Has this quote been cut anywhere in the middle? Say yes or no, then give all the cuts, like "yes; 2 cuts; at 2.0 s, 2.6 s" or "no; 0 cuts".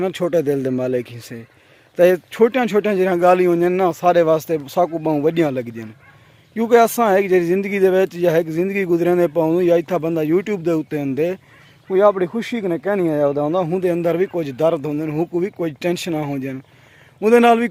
no; 0 cuts